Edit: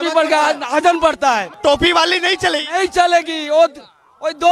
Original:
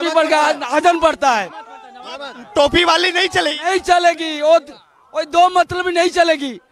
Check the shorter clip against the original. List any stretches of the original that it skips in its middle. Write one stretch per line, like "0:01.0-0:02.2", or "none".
0:01.5-0:02.4

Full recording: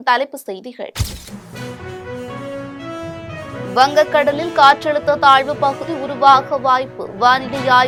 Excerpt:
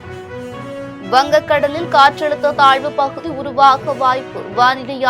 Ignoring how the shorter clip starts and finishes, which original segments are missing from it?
0:02.8-0:03.7

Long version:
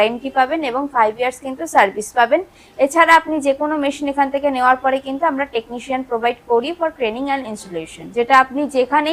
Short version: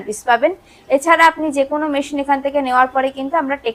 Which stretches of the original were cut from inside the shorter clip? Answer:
none

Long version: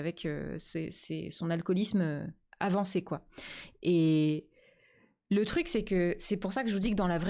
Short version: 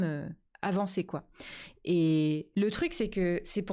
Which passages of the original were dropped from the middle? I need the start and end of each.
0:04.4-0:05.2

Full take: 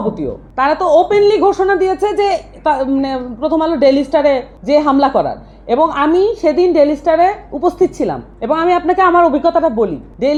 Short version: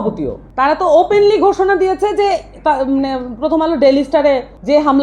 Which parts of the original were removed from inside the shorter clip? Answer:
none

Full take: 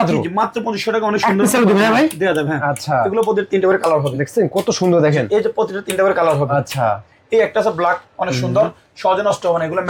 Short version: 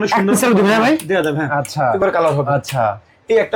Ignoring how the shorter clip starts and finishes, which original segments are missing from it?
0:03.1-0:06.0

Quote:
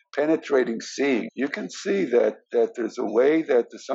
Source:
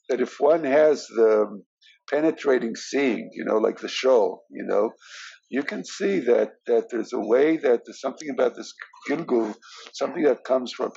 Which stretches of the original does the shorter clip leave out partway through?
0:03.2-0:05.4

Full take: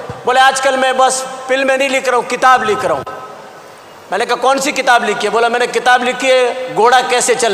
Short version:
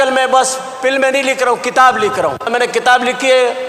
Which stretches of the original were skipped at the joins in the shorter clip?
0:03.2-0:05.5

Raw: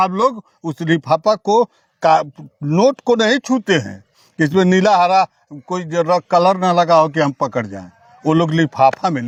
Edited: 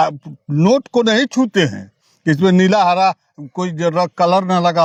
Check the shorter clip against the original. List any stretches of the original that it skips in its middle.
none

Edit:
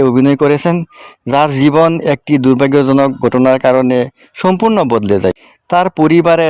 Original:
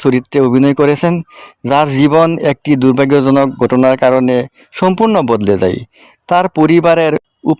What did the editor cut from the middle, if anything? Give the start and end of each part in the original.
0:05.9-0:06.1

